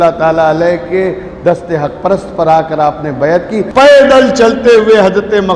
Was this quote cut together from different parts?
yes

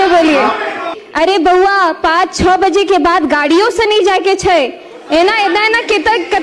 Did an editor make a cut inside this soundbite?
yes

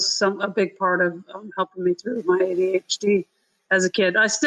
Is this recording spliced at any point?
no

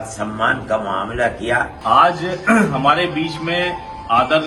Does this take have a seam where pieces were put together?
yes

